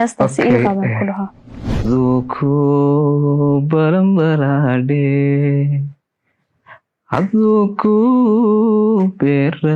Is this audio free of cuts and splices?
no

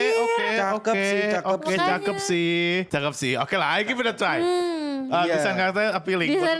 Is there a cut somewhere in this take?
yes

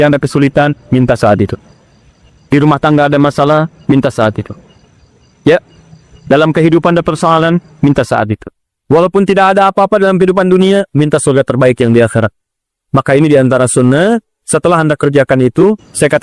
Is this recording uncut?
yes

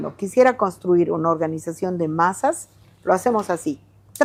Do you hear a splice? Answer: no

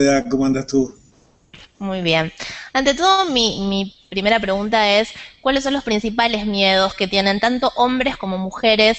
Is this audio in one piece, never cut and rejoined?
no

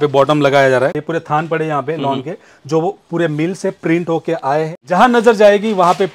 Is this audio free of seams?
no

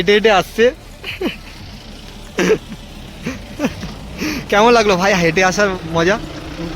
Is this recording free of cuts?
yes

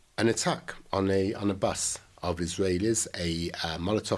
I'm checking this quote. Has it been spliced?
no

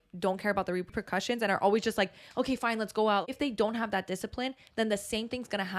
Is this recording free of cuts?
no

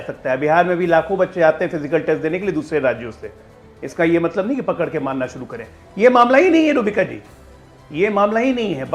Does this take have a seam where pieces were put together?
no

